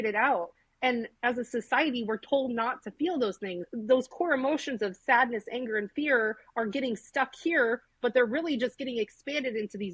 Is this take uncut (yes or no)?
no